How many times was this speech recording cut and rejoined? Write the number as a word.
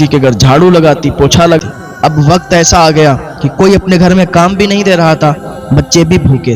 one